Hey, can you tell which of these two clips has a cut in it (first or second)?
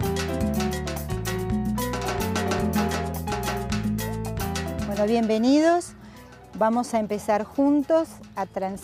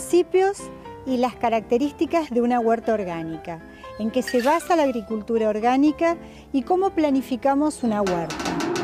second